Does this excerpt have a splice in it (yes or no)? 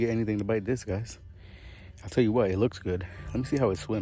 no